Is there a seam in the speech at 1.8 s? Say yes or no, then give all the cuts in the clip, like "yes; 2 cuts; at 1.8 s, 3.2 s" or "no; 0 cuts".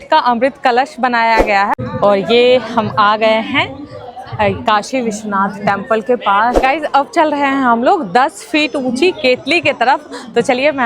yes; 2 cuts; at 1.8 s, 6.6 s